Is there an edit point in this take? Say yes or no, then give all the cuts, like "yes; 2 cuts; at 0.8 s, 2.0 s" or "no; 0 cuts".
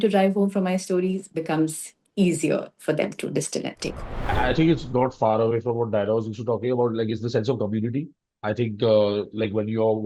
yes; 1 cut; at 4.3 s